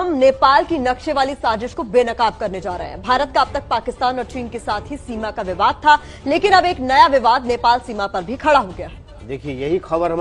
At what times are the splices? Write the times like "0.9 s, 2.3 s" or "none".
none